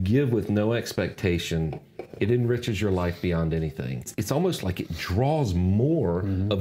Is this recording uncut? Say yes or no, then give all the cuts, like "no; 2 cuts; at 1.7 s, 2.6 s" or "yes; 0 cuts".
no; 1 cut; at 4.1 s